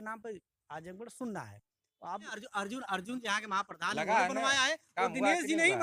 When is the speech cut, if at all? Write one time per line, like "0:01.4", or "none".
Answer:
0:02.4